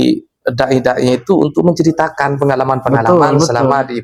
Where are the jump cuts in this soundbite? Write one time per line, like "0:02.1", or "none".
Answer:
none